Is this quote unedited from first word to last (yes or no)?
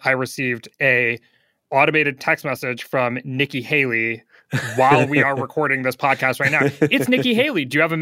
yes